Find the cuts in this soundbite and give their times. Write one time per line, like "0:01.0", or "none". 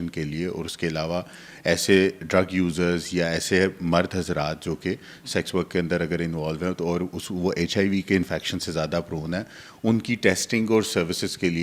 none